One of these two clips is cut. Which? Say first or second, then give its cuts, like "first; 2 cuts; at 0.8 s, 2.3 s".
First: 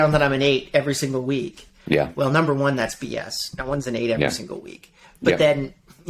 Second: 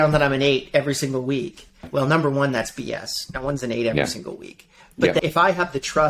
second; 2 cuts; at 1.8 s, 5.2 s